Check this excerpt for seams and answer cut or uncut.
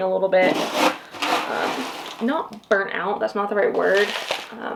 uncut